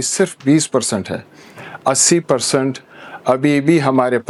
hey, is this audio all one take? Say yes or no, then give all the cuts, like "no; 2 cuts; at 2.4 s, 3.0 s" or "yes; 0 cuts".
yes; 0 cuts